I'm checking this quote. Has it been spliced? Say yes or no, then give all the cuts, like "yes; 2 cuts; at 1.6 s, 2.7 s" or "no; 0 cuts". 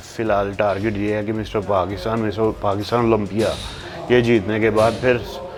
no; 0 cuts